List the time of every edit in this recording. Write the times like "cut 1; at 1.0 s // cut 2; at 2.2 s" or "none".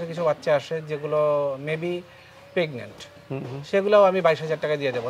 none